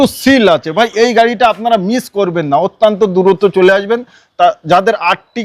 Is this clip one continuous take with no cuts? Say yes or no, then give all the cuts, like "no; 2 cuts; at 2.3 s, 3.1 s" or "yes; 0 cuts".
yes; 0 cuts